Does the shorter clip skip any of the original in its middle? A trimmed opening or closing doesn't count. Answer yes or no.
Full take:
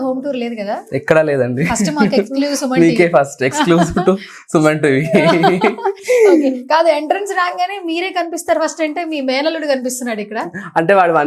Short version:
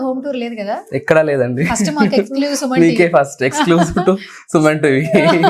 no